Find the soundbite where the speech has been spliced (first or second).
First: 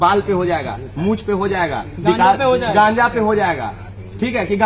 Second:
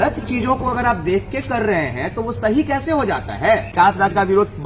second